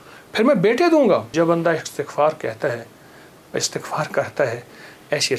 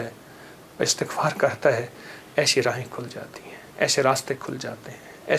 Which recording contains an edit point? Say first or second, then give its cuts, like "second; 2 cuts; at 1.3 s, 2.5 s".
first; 1 cut; at 1.3 s